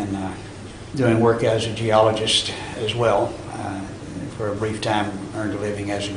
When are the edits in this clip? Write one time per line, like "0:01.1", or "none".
0:04.8